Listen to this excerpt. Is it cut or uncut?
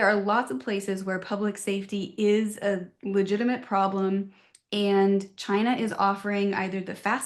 uncut